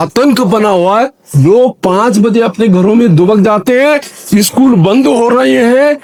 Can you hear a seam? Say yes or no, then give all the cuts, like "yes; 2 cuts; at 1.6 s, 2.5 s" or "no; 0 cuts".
no; 0 cuts